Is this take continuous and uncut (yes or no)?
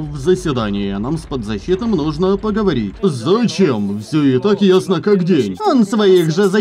no